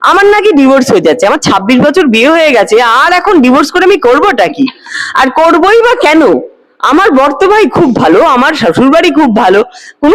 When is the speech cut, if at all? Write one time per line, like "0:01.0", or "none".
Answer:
none